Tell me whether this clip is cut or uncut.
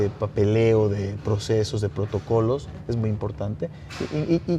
uncut